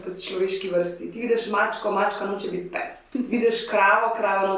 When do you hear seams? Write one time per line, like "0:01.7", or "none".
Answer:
0:03.0